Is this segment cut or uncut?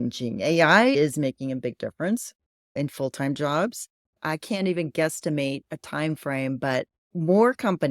cut